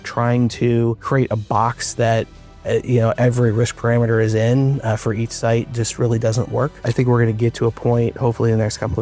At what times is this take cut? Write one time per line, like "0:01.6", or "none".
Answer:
0:01.0
0:06.8